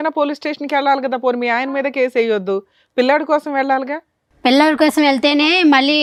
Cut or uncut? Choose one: uncut